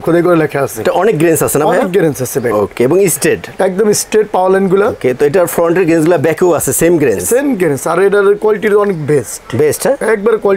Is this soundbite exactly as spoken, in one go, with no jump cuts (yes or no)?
yes